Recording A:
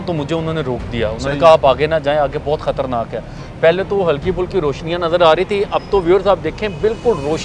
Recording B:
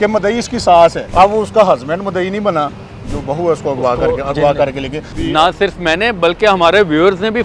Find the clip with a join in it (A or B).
B